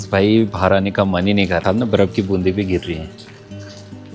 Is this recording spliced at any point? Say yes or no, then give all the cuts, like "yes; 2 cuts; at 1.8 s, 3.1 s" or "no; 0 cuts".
yes; 1 cut; at 1.6 s